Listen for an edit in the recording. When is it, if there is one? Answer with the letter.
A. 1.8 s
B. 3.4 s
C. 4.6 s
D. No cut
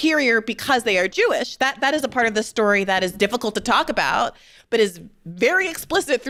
D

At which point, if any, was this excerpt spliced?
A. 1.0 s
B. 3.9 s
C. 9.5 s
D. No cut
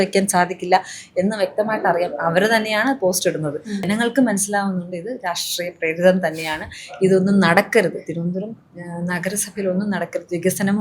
B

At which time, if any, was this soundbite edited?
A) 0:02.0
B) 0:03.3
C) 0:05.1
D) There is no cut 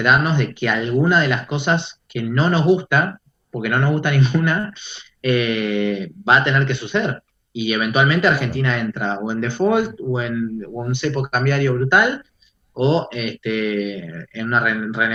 D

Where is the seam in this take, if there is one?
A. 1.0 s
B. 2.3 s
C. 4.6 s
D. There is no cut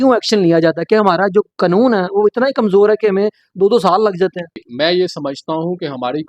C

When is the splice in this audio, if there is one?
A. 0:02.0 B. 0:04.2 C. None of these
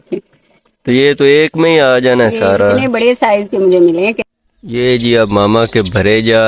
B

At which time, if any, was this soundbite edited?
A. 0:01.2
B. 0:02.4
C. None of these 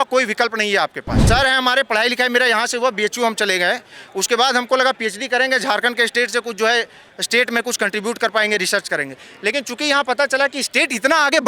A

